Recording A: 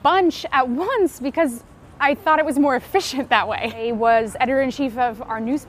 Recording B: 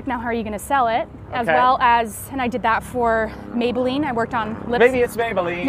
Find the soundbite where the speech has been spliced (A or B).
A